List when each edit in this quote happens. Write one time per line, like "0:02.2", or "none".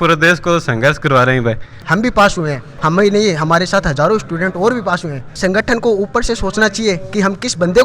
0:01.8
0:05.4